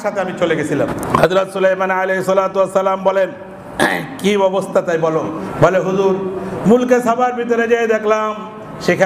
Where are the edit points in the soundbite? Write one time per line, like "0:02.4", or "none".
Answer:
0:01.0
0:05.4